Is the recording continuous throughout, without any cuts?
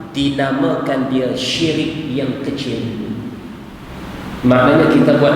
no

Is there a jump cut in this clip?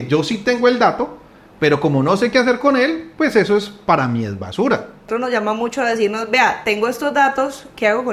yes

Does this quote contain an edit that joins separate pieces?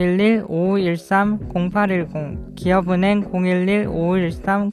no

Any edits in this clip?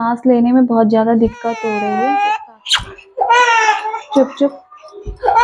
yes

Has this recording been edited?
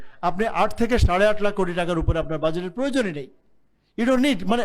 no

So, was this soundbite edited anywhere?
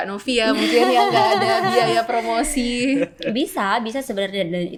no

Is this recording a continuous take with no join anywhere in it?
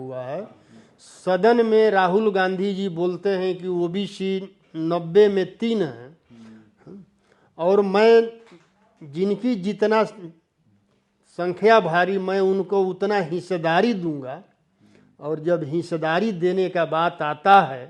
yes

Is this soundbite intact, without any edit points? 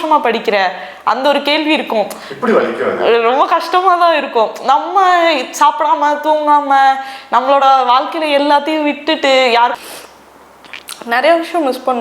no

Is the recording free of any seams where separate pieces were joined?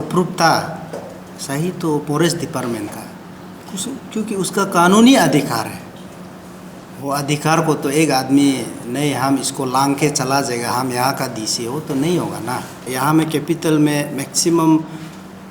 no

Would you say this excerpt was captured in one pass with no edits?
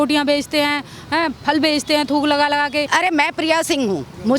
no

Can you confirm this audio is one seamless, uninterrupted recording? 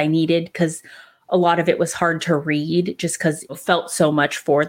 no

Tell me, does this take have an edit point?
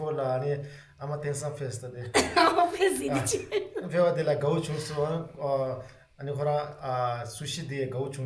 no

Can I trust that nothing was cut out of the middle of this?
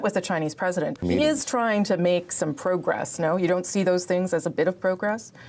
no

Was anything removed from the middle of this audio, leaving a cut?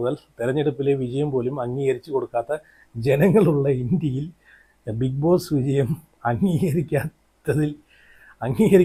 no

